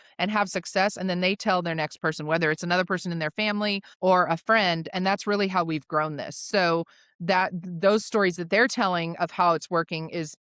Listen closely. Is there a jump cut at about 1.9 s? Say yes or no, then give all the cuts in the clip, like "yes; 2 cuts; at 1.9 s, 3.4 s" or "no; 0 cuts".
no; 1 cut; at 3.9 s